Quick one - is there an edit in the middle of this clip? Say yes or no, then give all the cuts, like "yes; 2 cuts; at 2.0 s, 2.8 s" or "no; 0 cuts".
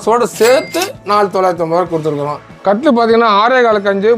yes; 1 cut; at 2.5 s